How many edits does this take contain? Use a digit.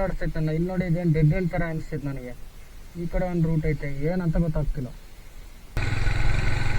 1